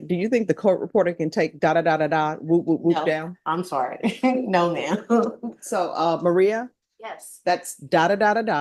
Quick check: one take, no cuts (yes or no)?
yes